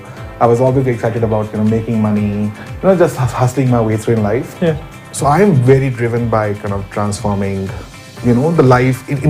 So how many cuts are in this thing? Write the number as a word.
one